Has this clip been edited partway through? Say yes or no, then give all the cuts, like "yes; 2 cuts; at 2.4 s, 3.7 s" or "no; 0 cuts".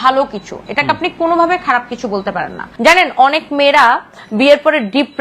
yes; 1 cut; at 2.6 s